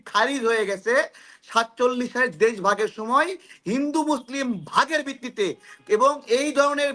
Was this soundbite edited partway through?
no; 0 cuts

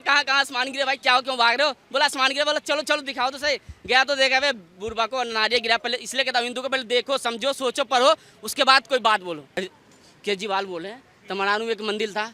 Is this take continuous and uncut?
no; 1 cut; at 9.5 s

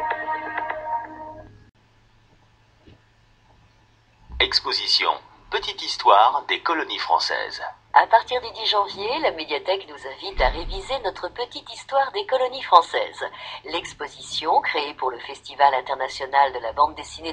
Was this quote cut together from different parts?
yes; 1 cut; at 1.7 s

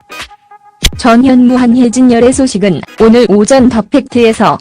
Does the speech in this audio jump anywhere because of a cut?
yes; 2 cuts; at 0.8 s, 2.1 s

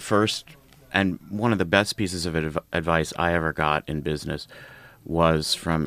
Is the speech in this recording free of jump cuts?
yes; 0 cuts

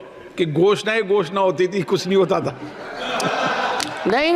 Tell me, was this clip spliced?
no; 0 cuts

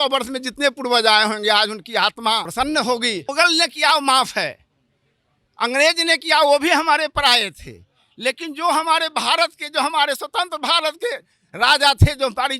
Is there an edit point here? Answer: yes; 2 cuts; at 2.5 s, 3.3 s

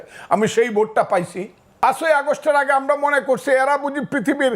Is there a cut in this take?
yes; 1 cut; at 1.8 s

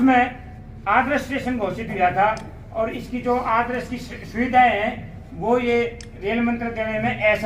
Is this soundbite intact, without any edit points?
yes; 0 cuts

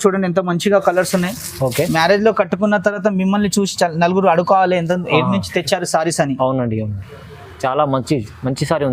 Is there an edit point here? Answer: no; 0 cuts

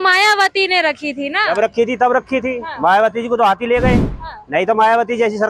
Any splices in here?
no; 0 cuts

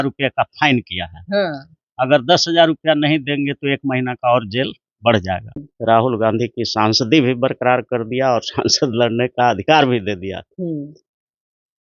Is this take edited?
yes; 1 cut; at 5.7 s

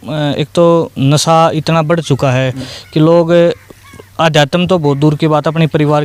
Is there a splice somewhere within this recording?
no; 0 cuts

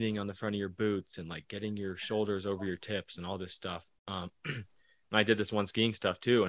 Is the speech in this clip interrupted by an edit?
no; 0 cuts

